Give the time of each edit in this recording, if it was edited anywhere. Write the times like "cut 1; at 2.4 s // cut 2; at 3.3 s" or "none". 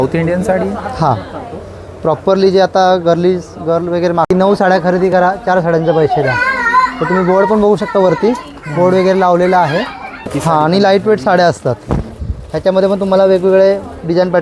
cut 1; at 4.3 s // cut 2; at 10.2 s

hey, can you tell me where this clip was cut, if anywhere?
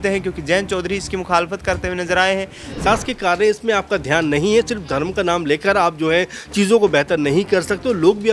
cut 1; at 2.8 s

